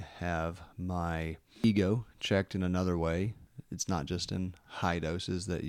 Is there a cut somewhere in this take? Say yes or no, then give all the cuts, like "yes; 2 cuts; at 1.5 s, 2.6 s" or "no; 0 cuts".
yes; 2 cuts; at 1.6 s, 3.5 s